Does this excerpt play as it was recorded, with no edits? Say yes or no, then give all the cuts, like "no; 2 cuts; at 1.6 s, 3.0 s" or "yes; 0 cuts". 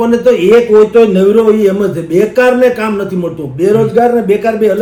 yes; 0 cuts